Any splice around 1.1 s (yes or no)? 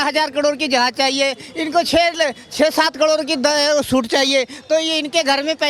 no